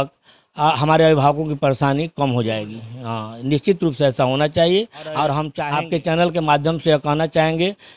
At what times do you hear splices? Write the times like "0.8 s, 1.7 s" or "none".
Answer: 5.5 s